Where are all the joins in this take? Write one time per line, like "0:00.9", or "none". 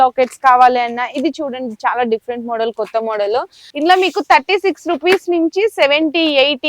0:03.6